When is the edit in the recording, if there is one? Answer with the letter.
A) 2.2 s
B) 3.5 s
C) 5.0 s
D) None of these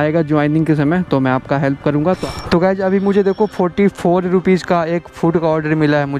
A